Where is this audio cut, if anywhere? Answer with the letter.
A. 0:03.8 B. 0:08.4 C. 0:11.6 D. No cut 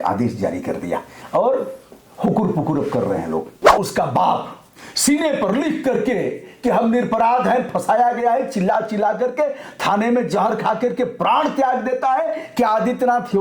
A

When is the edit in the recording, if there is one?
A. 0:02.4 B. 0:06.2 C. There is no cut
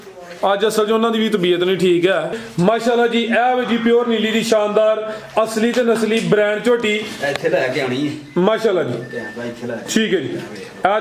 A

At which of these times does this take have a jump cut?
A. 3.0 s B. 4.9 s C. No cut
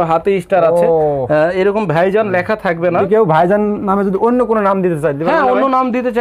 A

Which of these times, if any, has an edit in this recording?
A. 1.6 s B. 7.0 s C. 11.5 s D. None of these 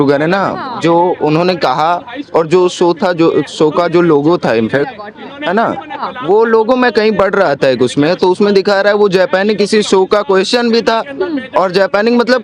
D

